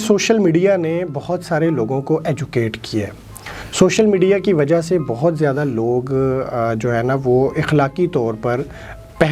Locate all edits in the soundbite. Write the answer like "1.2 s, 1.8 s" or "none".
none